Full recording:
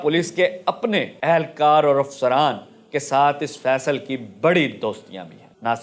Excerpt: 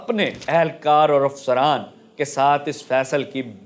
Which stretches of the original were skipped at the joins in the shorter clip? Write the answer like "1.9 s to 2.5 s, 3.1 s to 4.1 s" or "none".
none